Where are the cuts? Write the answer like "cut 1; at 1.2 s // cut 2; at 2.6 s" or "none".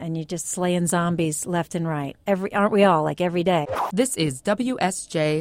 cut 1; at 2.1 s // cut 2; at 4.1 s